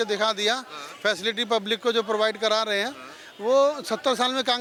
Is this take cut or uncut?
uncut